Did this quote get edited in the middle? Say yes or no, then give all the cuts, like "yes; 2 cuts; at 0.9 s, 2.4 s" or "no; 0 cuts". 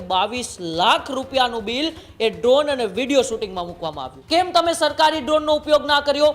yes; 1 cut; at 4.1 s